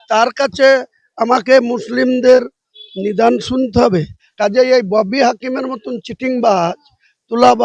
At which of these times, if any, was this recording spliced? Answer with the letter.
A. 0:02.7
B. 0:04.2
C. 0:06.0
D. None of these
B